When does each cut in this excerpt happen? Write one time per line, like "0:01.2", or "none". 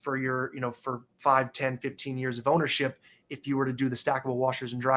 none